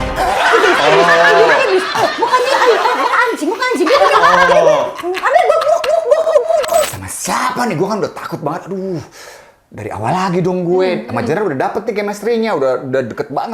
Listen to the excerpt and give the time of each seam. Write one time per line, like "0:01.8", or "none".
0:06.9

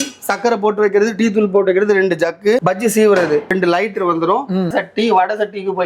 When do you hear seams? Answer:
0:02.2
0:03.5
0:04.7

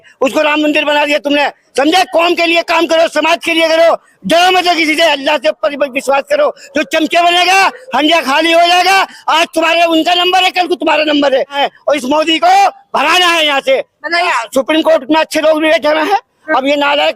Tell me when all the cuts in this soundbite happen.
0:11.5
0:14.3

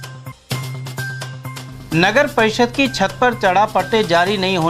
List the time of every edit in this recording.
0:01.5

